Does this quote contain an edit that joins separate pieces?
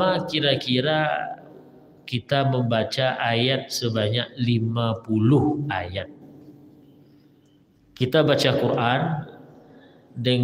no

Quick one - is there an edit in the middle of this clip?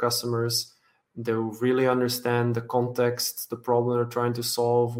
no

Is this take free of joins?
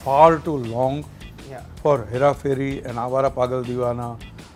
yes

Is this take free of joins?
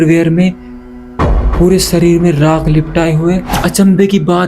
no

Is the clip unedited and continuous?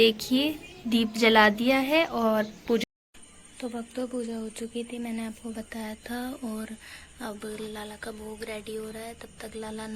no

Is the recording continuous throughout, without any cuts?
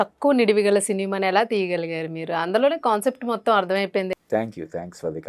no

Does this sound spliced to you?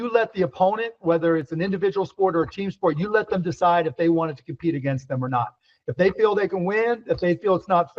yes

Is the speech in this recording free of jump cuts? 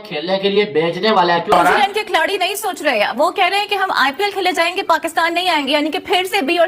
no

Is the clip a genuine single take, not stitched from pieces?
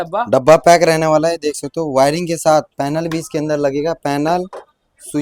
yes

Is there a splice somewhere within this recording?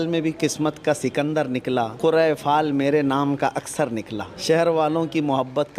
yes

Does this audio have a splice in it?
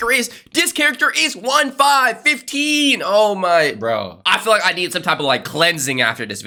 no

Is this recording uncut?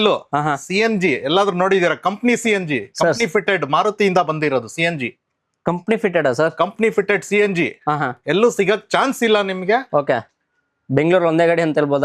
yes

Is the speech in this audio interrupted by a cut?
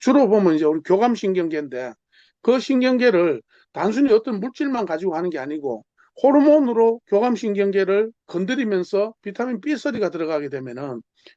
no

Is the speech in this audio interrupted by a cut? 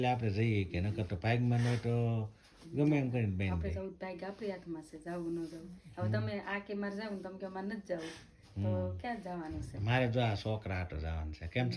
no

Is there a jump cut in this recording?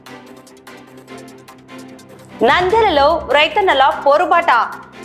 no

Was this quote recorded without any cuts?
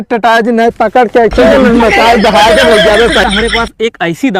no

